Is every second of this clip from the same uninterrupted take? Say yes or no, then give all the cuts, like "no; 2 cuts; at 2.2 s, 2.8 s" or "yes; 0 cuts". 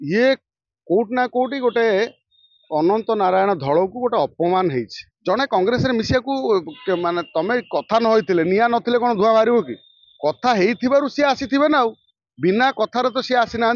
no; 1 cut; at 5.0 s